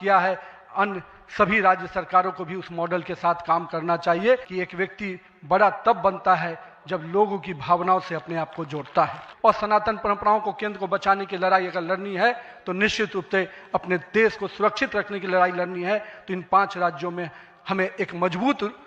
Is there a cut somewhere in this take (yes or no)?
yes